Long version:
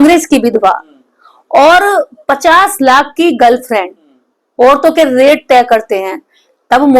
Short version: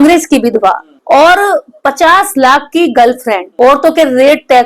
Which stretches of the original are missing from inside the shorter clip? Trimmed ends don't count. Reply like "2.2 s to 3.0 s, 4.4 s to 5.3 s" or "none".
0.9 s to 1.3 s, 3.9 s to 4.5 s